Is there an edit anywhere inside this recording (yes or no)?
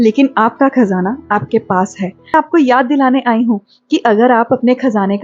yes